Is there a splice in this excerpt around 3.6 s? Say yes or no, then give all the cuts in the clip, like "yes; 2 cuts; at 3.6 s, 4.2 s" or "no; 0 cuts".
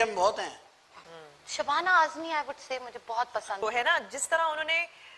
yes; 1 cut; at 3.6 s